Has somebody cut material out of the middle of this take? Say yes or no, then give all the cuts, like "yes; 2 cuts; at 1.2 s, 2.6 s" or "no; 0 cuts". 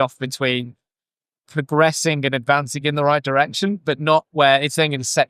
no; 0 cuts